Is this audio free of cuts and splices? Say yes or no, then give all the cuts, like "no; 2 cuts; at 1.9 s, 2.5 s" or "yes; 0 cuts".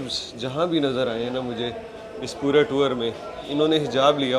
yes; 0 cuts